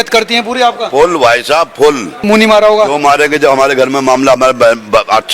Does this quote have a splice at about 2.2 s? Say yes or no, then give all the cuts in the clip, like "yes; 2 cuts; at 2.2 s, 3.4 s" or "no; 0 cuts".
yes; 1 cut; at 2.2 s